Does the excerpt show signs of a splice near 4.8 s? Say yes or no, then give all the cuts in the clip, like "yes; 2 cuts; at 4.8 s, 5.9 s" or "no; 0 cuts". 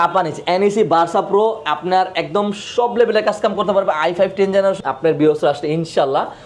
yes; 1 cut; at 4.8 s